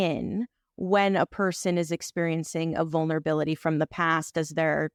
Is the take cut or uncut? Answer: uncut